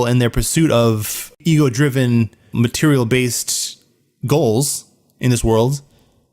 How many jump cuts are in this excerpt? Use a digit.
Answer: 2